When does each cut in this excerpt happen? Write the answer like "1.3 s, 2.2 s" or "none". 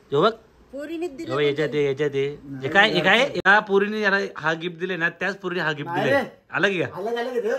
3.4 s